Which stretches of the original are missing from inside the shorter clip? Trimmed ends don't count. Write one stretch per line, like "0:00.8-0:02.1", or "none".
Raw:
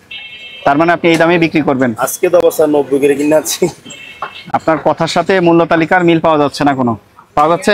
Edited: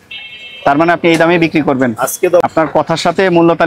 0:02.4-0:04.5